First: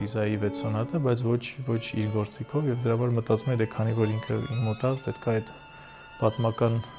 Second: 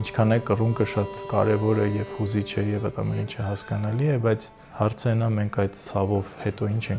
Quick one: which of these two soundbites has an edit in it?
second; 3 cuts; at 1.2 s, 4.6 s, 5.8 s

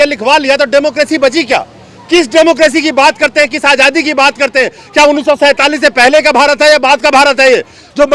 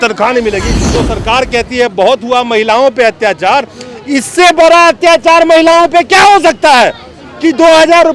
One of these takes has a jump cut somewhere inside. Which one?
second; 1 cut; at 0.9 s

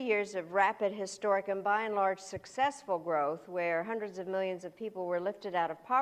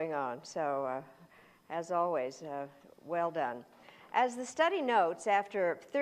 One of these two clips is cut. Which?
second; 1 cut; at 1.1 s

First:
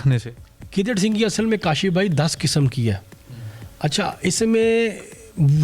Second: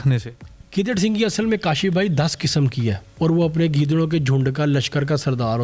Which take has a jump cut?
second; 1 cut; at 3.0 s

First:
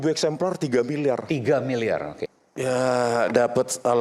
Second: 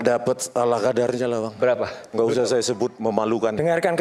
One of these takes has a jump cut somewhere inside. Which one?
first; 1 cut; at 2.3 s

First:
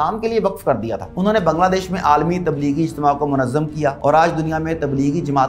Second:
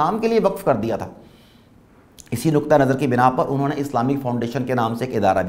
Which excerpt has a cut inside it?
first; 2 cuts; at 1.0 s, 4.0 s

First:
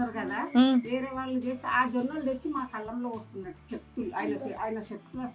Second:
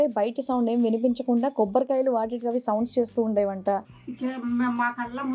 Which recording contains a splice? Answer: second; 1 cut; at 4.0 s

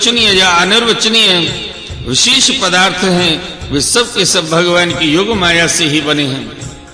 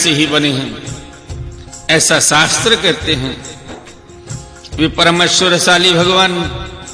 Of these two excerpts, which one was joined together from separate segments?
second; 2 cuts; at 3.5 s, 4.8 s

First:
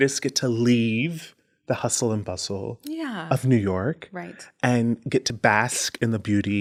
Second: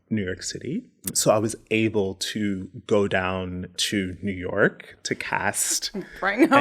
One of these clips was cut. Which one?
second; 1 cut; at 1.1 s

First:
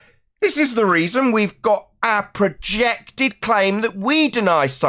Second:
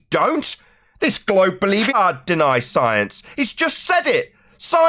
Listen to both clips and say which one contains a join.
second; 1 cut; at 1.9 s

